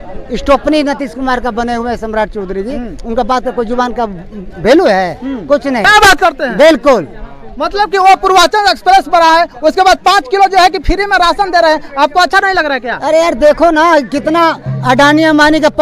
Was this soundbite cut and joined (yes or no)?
yes